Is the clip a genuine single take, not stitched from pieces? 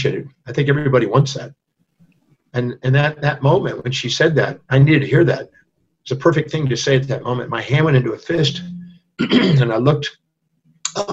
yes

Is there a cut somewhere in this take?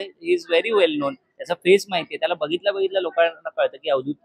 no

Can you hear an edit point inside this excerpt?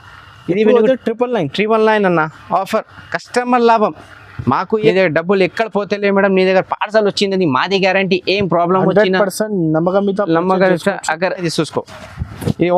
yes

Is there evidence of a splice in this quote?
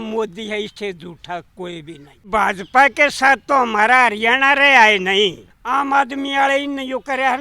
yes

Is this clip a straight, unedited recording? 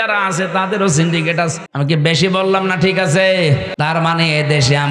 no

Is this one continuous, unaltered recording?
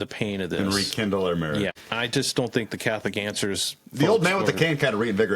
no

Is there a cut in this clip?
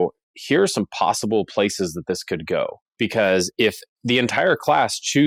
no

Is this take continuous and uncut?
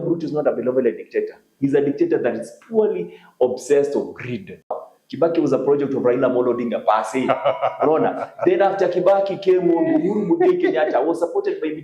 no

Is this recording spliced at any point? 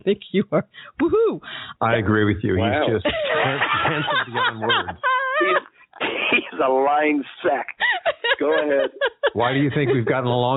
no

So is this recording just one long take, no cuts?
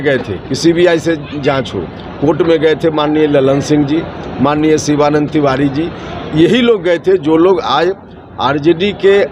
yes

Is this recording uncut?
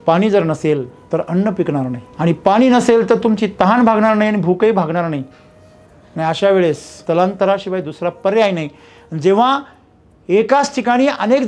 no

